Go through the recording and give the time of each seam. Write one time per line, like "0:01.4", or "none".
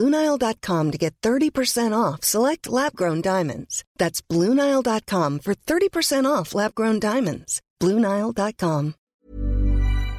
0:09.0

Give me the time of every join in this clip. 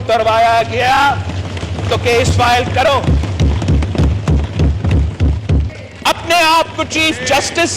0:05.8

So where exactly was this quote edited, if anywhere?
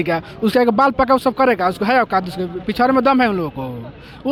none

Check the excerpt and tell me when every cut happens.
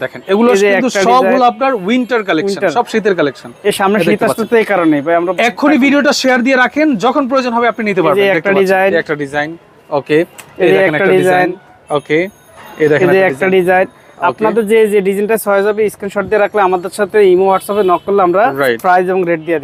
none

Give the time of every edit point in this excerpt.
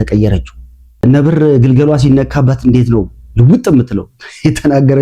0:01.0

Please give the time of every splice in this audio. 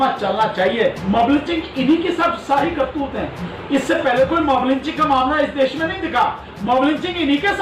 0:01.0

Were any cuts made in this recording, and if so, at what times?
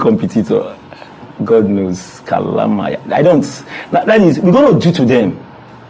none

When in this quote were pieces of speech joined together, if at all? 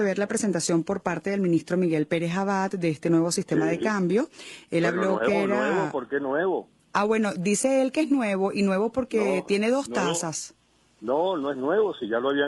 0:02.7

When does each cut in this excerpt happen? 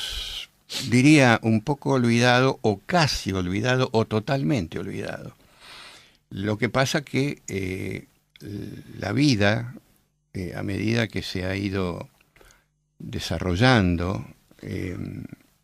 0:14.7

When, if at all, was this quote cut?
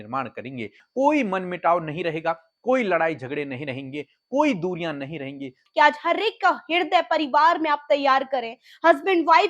0:00.8
0:05.6

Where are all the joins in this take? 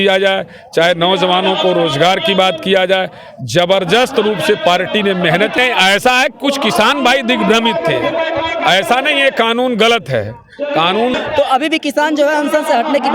0:05.5
0:11.2

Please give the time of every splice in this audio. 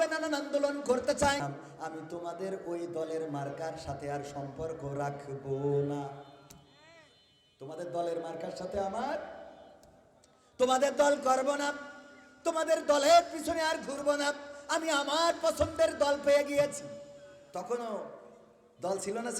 0:01.5

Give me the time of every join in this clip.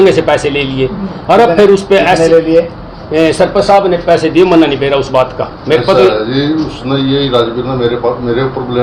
none

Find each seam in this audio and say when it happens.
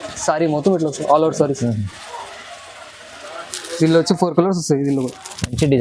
none

